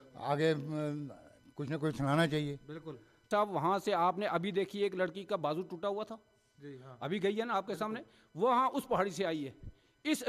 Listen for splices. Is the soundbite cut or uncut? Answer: cut